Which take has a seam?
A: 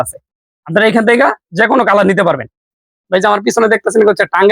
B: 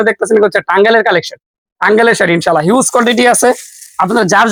A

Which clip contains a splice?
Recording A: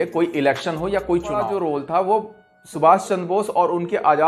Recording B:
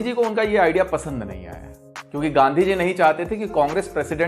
A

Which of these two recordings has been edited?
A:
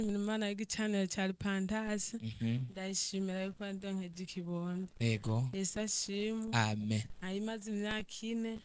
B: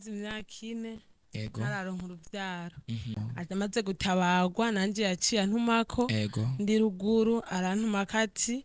B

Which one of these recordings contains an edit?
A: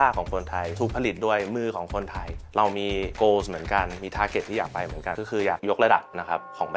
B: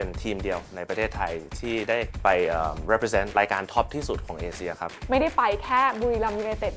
B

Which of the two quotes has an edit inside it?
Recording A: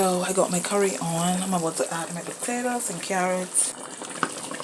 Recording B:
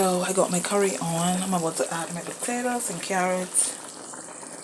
A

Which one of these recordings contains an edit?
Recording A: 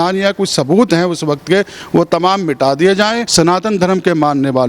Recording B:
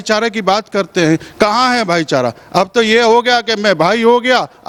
A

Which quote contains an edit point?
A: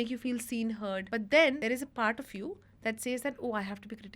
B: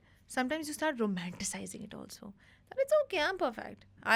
A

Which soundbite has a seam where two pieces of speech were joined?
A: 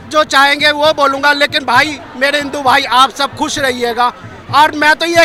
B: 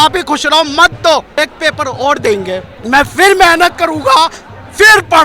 B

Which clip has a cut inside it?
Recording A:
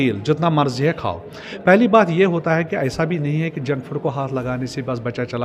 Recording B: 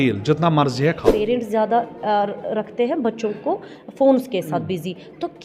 B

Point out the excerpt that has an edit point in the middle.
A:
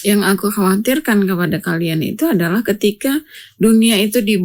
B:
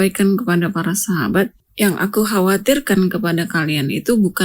B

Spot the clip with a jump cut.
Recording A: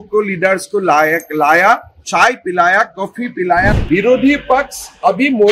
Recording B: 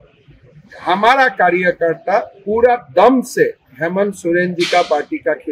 A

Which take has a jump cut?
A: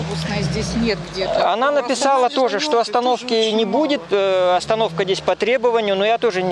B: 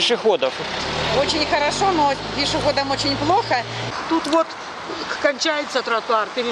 B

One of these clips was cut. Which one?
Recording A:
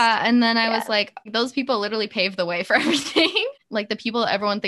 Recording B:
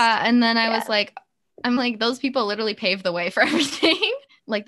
A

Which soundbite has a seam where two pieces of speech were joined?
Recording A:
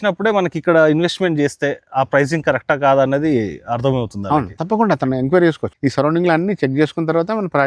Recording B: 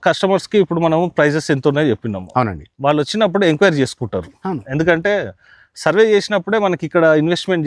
A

